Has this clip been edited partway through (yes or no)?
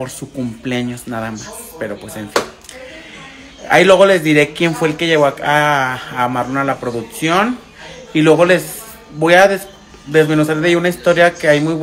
no